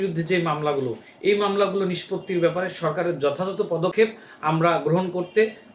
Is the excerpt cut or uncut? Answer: uncut